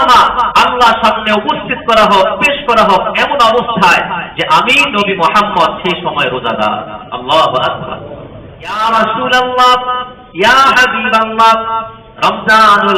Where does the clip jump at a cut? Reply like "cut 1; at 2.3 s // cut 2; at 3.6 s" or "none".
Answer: cut 1; at 8.8 s // cut 2; at 12.0 s